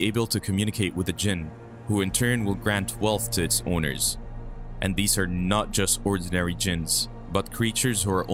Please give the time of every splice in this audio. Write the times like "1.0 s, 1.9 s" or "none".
none